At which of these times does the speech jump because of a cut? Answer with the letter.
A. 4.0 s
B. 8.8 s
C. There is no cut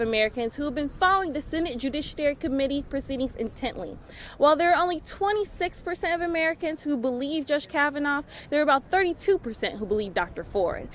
C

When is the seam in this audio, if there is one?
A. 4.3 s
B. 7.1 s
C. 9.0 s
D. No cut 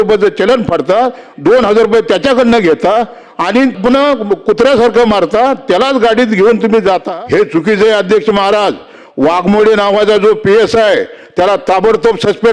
B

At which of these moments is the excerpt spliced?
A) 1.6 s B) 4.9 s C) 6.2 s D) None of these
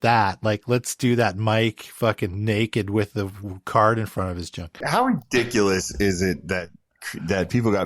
B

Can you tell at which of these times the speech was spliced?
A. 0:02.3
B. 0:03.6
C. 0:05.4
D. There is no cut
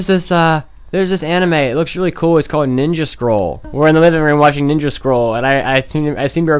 B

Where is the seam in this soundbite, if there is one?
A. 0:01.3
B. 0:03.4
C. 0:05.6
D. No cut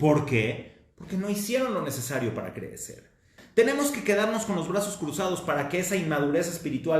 B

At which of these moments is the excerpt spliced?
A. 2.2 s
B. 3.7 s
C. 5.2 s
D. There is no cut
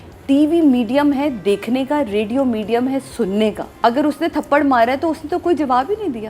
B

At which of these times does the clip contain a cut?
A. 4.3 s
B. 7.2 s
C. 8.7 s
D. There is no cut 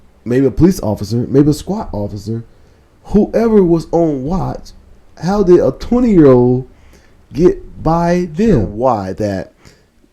C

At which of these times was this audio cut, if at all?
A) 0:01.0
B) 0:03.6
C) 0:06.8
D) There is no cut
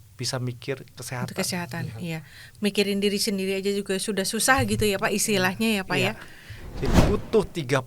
C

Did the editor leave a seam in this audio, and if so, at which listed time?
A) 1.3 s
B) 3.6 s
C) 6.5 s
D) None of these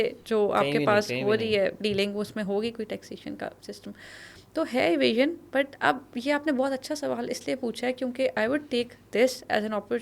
D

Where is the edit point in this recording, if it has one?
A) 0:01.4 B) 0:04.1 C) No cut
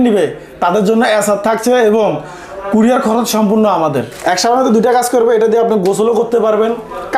B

